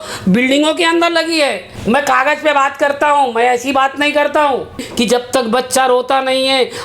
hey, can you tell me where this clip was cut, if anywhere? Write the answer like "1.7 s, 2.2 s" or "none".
1.7 s, 4.8 s